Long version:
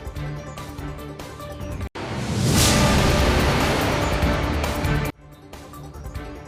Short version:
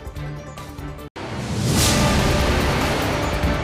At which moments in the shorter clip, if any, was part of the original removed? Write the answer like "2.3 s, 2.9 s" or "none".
1.1 s